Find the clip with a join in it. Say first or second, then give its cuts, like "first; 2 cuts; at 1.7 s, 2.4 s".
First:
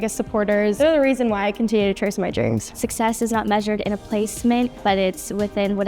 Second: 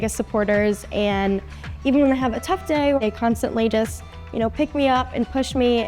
first; 3 cuts; at 0.8 s, 2.7 s, 4.8 s